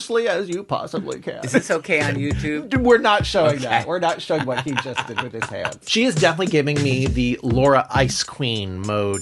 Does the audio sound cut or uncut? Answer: cut